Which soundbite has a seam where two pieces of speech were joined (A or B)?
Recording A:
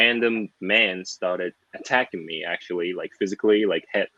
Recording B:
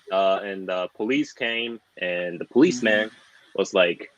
B